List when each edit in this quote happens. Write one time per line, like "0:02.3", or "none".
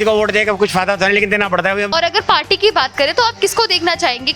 0:01.9